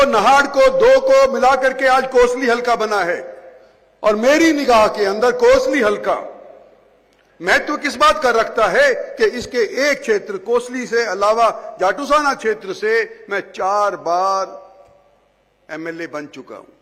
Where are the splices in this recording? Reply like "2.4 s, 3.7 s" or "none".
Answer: none